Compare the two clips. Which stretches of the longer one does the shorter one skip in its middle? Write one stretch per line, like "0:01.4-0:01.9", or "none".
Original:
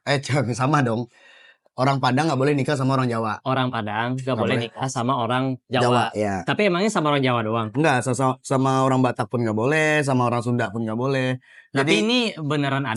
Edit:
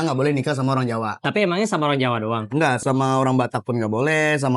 0:03.4-0:06.4
0:08.0-0:08.4